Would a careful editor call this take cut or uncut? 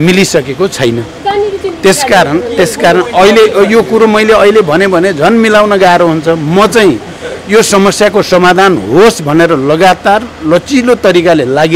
uncut